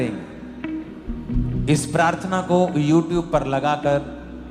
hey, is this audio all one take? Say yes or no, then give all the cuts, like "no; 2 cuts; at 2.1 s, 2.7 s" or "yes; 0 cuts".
no; 1 cut; at 1.2 s